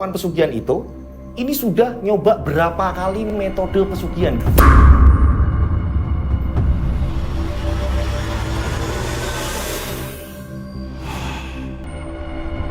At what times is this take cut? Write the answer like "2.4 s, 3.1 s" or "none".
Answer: 3.3 s